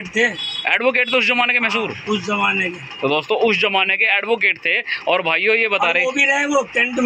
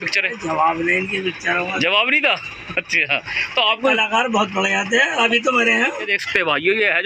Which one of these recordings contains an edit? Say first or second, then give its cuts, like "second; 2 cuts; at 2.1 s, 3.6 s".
second; 1 cut; at 6.1 s